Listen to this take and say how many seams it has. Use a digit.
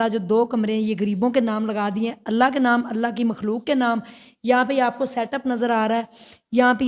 0